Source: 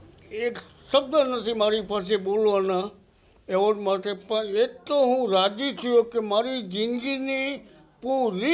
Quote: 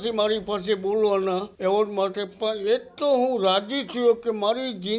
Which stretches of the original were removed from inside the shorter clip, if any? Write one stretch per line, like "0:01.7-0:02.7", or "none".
0:02.9-0:03.4